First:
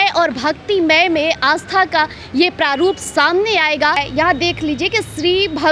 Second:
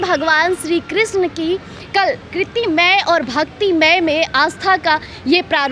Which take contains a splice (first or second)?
first